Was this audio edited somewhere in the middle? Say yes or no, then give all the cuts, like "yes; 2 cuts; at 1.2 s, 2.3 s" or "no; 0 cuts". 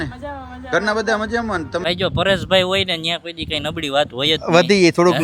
yes; 1 cut; at 1.8 s